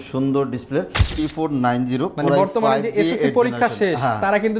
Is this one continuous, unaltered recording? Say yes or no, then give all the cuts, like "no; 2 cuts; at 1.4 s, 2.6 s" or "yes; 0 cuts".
no; 1 cut; at 1.0 s